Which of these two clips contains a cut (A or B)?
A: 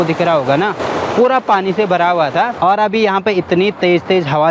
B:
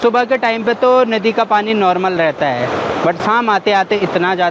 A